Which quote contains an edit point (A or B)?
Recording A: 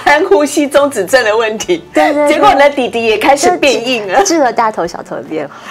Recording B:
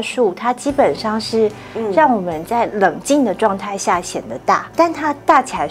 B